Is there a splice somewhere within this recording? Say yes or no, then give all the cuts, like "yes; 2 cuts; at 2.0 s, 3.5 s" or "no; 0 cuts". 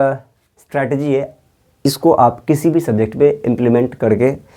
no; 0 cuts